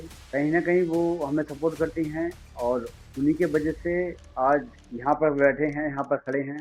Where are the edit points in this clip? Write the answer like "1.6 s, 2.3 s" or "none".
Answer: 4.8 s